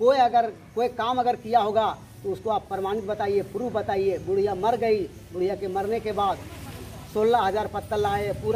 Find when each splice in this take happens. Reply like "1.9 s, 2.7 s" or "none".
none